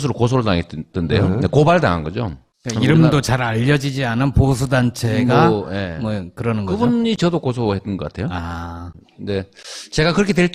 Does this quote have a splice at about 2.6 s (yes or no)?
no